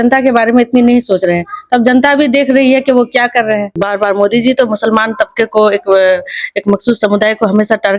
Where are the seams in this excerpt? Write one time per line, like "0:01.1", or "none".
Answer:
0:03.8